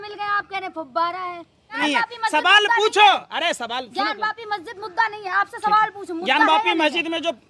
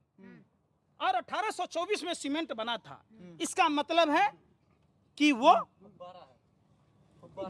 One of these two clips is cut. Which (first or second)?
first